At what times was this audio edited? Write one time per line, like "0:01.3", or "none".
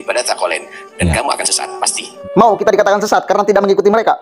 0:02.0